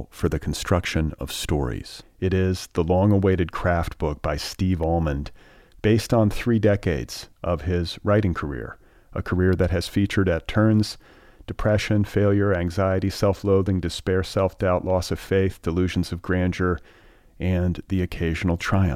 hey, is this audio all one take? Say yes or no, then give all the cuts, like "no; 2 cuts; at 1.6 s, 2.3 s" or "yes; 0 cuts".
yes; 0 cuts